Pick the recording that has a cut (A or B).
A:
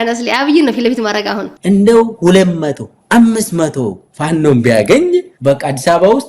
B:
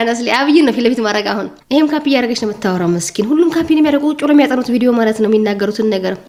A